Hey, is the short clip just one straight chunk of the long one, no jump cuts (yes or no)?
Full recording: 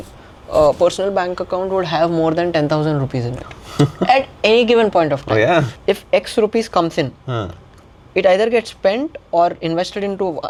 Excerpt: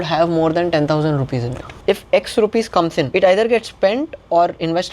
no